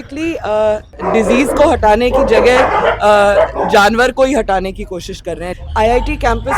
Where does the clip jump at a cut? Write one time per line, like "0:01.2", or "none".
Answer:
0:00.9
0:05.5